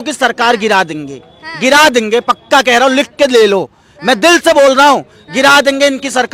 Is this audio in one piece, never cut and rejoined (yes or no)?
yes